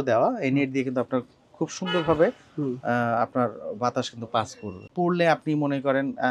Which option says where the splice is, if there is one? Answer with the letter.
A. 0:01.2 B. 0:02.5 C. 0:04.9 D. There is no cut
C